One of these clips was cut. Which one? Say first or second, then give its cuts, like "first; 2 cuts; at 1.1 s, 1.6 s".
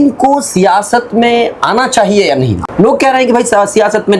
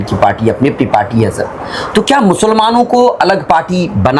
first; 1 cut; at 2.6 s